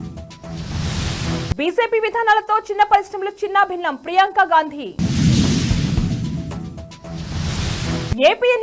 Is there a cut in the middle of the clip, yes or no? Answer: no